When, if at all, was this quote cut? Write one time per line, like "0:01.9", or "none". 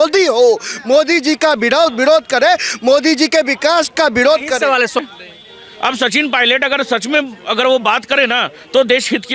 0:04.9